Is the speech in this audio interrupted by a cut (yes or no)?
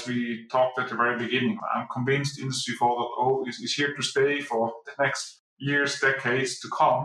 yes